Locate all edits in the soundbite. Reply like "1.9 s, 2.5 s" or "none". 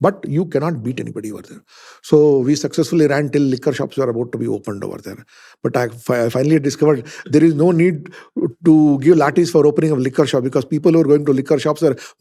none